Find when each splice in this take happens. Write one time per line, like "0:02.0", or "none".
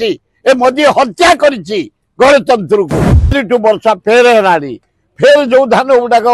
0:03.4